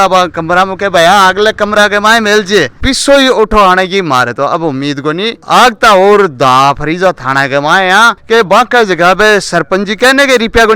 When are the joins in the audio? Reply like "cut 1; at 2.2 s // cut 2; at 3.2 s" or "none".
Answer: cut 1; at 2.8 s // cut 2; at 5.4 s // cut 3; at 8.2 s